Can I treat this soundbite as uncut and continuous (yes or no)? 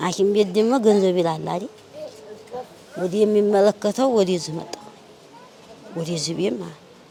yes